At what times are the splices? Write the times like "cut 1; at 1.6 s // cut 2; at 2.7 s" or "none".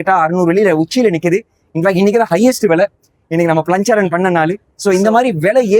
cut 1; at 4.7 s